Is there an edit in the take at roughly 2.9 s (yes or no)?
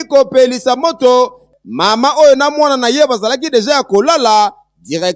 no